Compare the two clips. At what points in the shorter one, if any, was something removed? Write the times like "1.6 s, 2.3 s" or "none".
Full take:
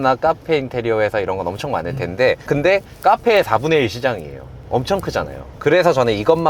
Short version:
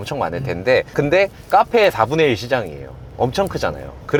none